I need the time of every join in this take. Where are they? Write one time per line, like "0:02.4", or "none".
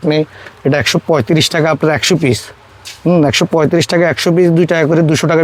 none